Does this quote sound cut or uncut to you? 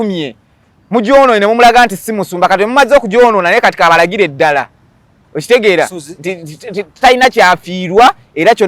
uncut